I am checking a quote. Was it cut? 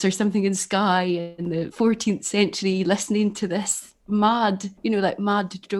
yes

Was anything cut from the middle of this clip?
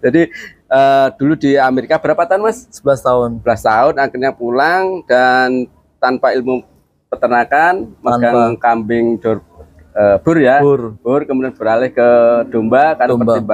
no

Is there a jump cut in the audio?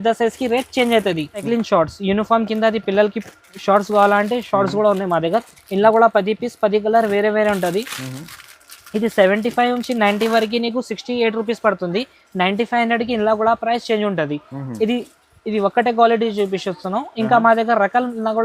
yes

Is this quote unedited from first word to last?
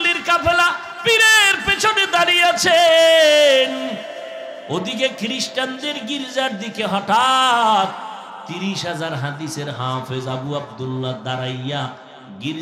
no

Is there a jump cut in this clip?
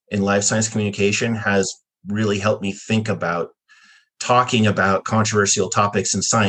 no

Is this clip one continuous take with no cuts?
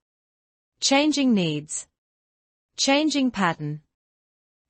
yes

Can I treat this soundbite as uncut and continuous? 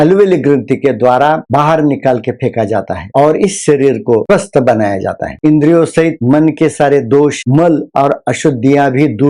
no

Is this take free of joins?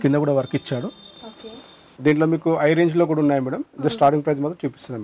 no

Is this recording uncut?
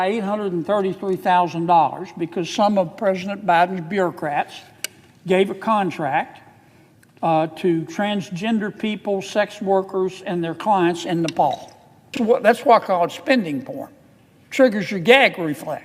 no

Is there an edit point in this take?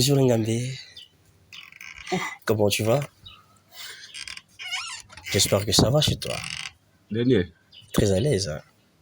no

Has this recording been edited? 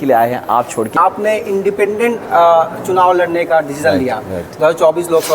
yes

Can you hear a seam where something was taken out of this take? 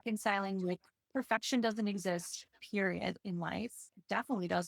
yes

